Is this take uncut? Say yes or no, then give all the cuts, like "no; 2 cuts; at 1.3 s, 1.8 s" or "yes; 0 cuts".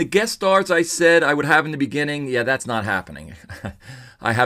yes; 0 cuts